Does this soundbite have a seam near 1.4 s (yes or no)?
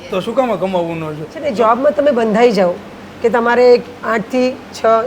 yes